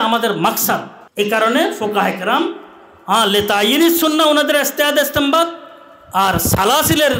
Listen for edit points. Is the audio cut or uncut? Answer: cut